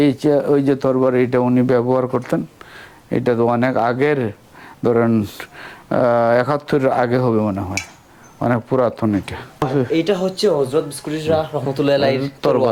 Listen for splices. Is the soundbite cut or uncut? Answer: uncut